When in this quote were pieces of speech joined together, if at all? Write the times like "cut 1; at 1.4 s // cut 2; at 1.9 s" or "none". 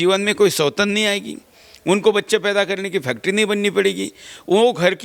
none